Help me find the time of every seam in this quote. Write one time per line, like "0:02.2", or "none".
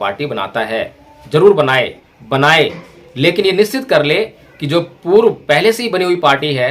0:02.0